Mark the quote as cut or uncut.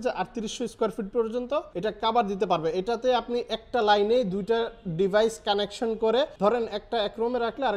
cut